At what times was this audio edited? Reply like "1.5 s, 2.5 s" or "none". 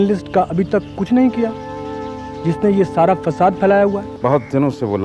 4.1 s